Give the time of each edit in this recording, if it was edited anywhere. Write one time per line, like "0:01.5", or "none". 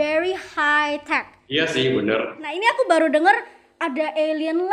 0:01.4
0:02.5